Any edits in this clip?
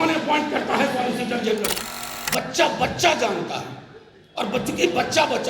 yes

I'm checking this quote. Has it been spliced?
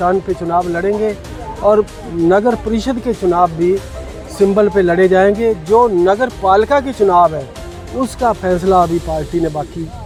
no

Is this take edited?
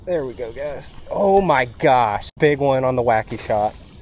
yes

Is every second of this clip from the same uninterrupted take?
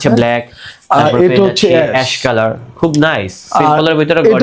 yes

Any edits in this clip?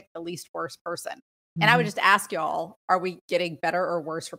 yes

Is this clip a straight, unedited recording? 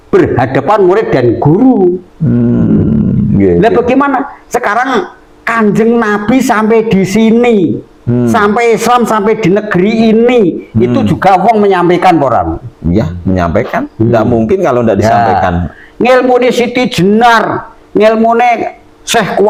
yes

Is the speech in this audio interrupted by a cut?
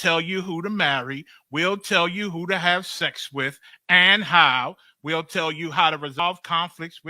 yes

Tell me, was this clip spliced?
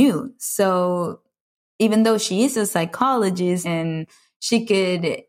yes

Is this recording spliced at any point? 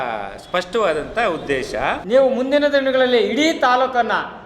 yes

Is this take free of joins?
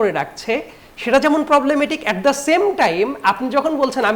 yes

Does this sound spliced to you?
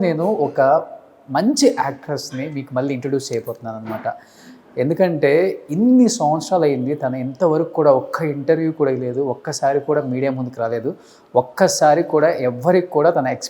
no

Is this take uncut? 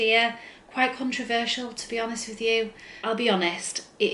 no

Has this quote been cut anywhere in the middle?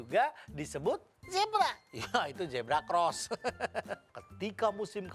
yes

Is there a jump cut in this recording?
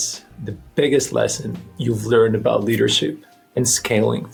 no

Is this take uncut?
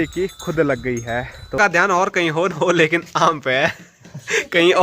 no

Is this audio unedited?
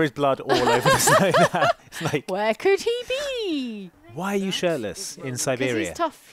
no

